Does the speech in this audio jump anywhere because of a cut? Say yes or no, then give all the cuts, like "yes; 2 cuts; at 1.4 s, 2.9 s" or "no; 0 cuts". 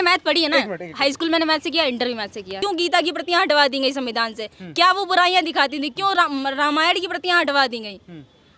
yes; 1 cut; at 2.6 s